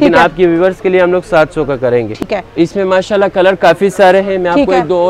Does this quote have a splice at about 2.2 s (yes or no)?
no